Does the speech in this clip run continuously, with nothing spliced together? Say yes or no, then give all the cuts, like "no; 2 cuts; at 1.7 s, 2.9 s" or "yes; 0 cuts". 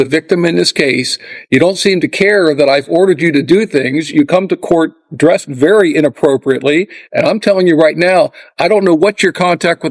yes; 0 cuts